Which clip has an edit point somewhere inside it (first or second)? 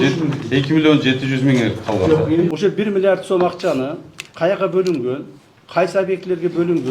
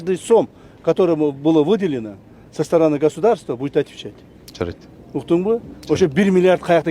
first